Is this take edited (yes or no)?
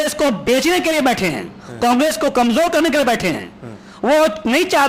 no